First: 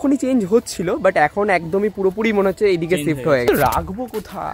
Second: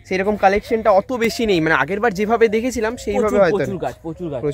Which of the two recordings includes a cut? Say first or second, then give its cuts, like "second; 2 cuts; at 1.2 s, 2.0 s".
first; 1 cut; at 3.4 s